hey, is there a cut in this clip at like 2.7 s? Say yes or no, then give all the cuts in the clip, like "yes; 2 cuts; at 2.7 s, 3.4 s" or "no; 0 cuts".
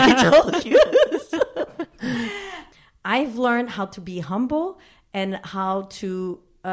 yes; 1 cut; at 2.7 s